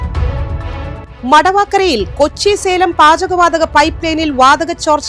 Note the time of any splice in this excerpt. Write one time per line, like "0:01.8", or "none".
0:01.1